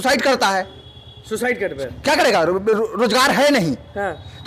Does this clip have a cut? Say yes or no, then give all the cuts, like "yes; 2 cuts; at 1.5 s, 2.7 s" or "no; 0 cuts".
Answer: no; 0 cuts